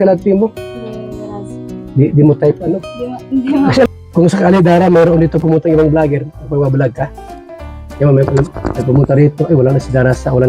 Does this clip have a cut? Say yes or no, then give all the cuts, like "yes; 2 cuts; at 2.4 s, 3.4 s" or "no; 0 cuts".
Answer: yes; 1 cut; at 3.9 s